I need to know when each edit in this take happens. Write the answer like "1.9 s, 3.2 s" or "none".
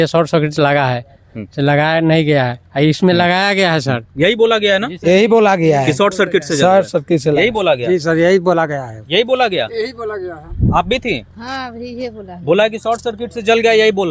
none